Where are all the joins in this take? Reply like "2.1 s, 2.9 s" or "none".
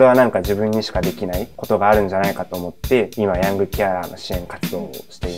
1.5 s, 3.1 s

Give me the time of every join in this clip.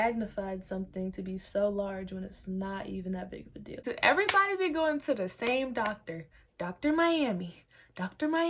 3.9 s

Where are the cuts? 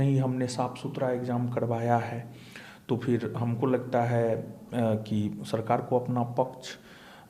none

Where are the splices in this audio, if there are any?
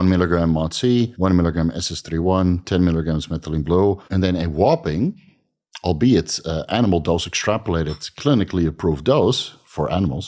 1.1 s, 4.0 s

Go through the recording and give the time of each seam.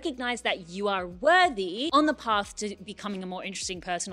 none

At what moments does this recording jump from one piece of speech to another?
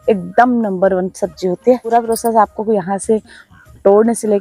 1.9 s

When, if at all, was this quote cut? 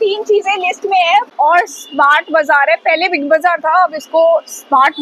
1.3 s

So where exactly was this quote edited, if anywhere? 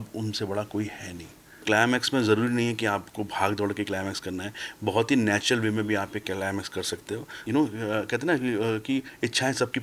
1.6 s, 7.3 s

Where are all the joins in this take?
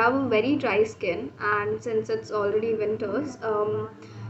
none

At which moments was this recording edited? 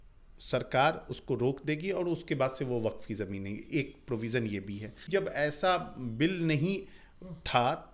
5.1 s

